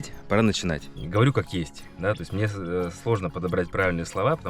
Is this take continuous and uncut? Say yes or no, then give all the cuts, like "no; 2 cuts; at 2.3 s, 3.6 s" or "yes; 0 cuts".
no; 1 cut; at 1.0 s